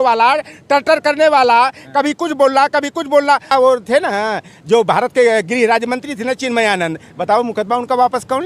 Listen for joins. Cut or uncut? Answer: cut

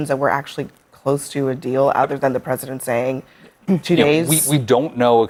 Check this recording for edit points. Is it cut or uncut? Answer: uncut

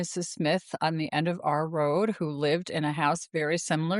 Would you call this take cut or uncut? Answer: uncut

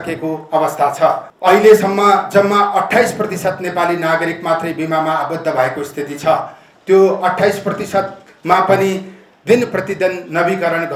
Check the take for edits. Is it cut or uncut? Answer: uncut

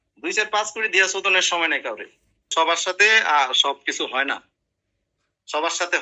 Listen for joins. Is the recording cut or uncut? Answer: cut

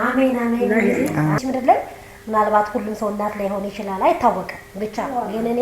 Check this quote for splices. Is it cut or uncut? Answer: cut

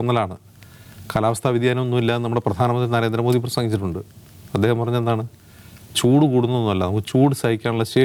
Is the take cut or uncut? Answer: uncut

